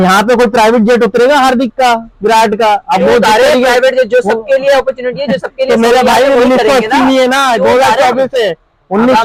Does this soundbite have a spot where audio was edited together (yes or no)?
no